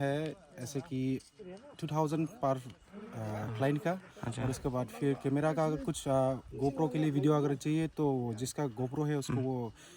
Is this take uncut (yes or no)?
yes